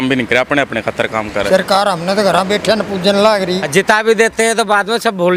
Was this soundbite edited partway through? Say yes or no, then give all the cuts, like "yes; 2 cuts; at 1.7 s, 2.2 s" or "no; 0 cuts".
yes; 2 cuts; at 1.5 s, 3.6 s